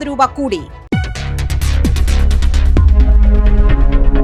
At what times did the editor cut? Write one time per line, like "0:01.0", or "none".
none